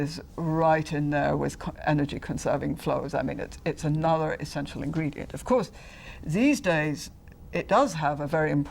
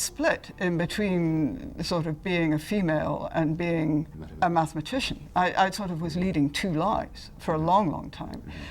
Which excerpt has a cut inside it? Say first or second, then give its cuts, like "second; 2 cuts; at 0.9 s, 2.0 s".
second; 1 cut; at 4.2 s